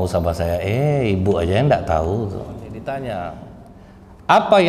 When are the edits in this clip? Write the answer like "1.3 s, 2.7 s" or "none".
2.8 s